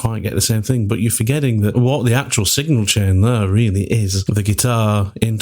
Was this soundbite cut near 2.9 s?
no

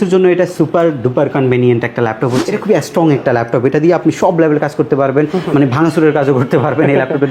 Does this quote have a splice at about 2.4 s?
yes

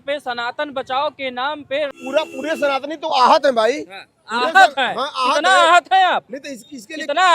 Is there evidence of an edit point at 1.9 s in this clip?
yes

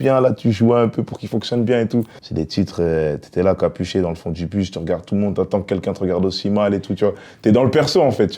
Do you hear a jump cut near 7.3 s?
no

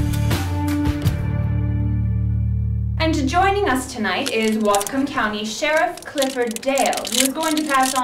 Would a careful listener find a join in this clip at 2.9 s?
yes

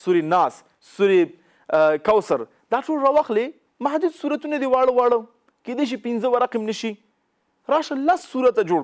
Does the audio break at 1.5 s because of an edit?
no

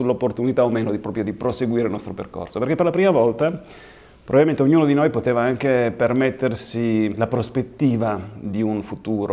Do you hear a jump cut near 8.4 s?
no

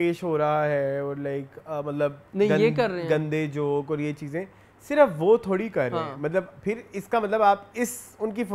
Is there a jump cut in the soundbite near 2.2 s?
yes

